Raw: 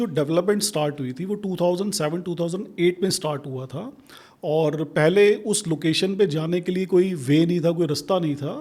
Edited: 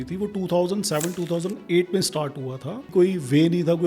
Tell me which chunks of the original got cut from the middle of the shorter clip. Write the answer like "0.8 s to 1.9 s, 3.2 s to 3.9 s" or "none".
4.0 s to 6.9 s